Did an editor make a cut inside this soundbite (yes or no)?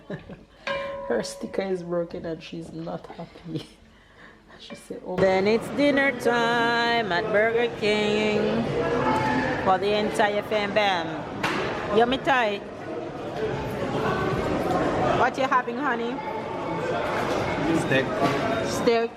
yes